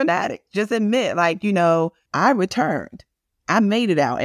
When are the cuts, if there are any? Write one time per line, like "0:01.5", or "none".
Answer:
0:02.0